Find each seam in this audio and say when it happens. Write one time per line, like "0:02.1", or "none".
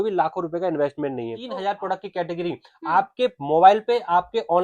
0:01.4